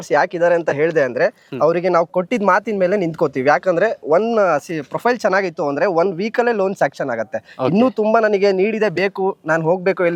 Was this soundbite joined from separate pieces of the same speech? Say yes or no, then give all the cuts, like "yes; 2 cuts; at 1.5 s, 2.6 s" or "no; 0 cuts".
no; 0 cuts